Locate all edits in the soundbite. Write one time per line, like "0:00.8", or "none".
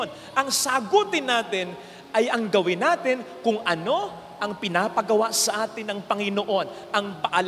none